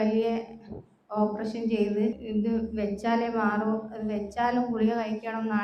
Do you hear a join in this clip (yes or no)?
yes